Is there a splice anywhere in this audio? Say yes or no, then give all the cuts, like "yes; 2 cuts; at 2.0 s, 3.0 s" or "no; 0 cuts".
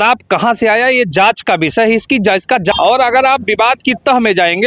yes; 1 cut; at 2.7 s